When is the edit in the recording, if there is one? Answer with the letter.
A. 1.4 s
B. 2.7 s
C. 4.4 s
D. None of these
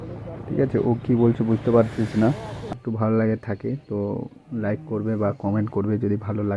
B